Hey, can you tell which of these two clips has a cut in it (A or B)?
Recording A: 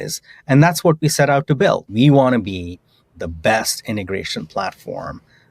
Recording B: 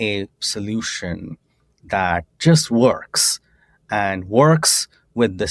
A